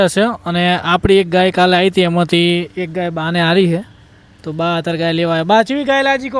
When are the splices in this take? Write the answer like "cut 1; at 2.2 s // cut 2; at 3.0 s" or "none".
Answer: none